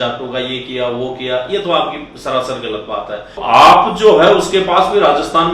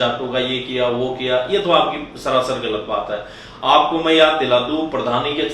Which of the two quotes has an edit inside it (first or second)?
first